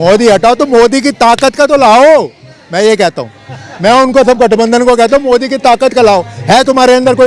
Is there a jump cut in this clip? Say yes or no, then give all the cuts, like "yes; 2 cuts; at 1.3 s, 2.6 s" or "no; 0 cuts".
no; 0 cuts